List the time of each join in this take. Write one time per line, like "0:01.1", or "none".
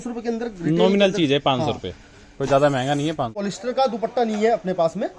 0:03.5